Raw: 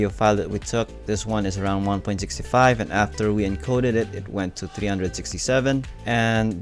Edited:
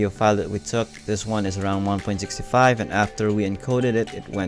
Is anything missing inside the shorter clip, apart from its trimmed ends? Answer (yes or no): no